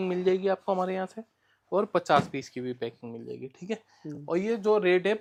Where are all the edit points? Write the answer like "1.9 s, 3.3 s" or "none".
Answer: none